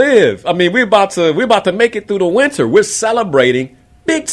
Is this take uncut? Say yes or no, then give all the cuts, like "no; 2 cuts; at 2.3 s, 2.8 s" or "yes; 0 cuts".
yes; 0 cuts